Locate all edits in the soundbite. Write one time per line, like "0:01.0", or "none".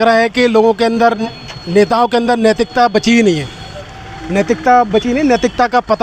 none